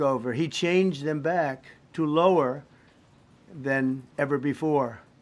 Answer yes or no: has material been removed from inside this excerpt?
no